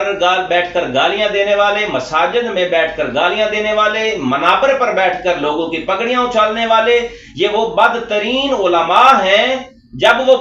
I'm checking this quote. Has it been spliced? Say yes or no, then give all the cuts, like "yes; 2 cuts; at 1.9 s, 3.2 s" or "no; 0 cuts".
no; 0 cuts